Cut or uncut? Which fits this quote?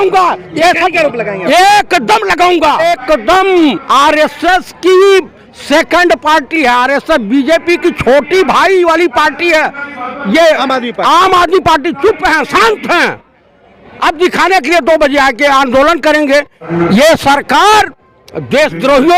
cut